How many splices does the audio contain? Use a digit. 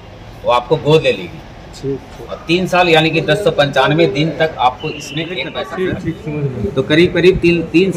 1